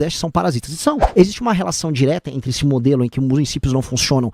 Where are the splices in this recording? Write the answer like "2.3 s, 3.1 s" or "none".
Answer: 1.0 s